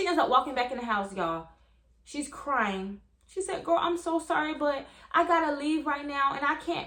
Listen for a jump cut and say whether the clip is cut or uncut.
uncut